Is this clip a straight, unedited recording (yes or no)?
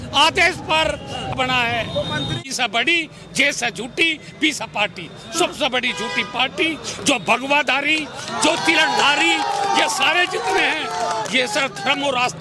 no